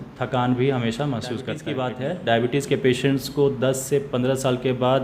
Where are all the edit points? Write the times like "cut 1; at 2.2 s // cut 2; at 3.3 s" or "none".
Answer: cut 1; at 1.6 s